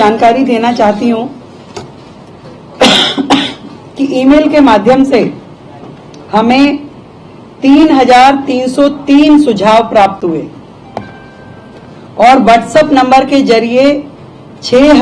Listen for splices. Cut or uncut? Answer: uncut